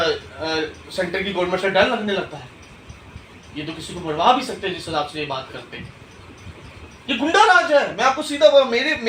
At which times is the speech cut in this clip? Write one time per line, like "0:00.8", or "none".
none